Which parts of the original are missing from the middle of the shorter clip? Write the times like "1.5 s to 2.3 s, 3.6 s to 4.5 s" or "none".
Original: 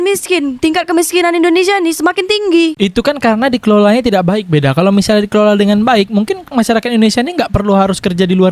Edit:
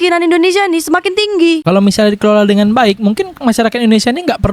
2.7 s to 4.7 s